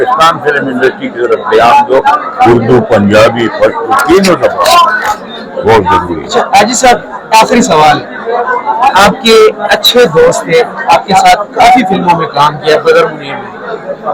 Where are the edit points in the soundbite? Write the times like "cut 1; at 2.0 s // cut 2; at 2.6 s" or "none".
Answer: none